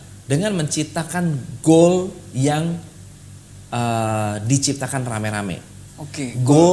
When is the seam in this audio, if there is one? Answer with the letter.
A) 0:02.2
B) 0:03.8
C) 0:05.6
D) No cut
D